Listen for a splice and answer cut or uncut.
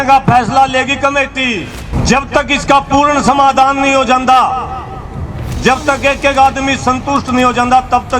cut